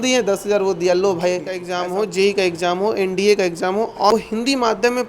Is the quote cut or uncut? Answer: cut